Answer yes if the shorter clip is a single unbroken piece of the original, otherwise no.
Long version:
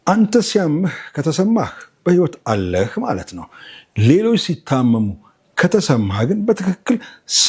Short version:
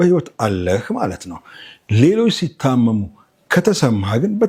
yes